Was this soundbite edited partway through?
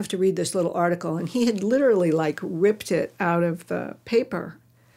no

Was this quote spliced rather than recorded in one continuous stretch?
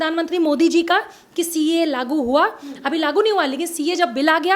no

